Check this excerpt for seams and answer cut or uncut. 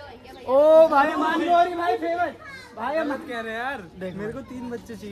uncut